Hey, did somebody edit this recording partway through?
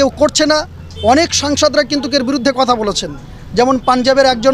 no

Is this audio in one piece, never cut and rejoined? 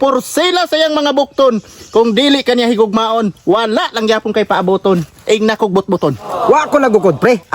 no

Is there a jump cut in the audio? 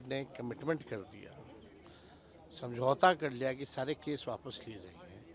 no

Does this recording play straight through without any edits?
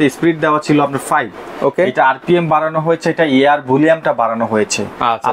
yes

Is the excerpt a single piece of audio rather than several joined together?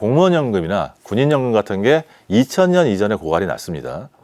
yes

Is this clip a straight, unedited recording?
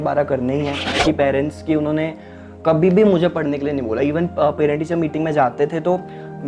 no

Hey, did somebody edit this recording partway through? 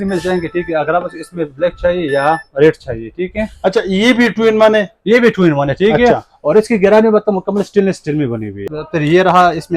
yes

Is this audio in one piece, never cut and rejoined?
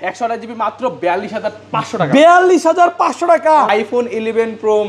no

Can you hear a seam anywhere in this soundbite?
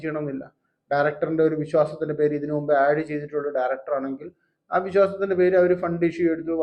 no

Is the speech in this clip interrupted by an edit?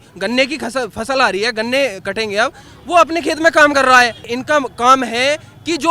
yes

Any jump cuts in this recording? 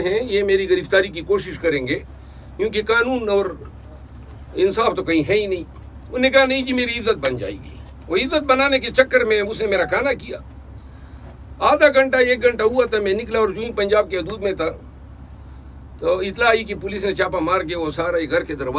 no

